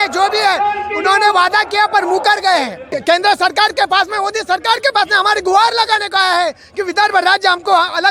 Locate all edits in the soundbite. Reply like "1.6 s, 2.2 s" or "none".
2.9 s